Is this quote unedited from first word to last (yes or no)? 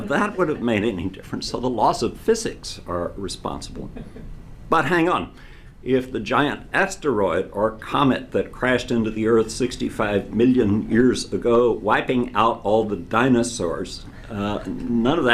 no